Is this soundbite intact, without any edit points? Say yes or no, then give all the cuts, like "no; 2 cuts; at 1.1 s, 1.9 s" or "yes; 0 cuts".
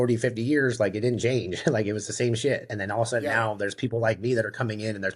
yes; 0 cuts